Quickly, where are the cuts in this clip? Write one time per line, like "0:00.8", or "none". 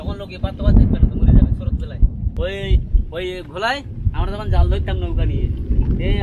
0:02.0